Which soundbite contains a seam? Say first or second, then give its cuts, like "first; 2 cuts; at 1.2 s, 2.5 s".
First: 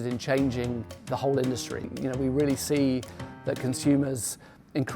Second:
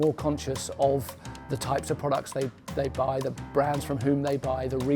first; 1 cut; at 1.9 s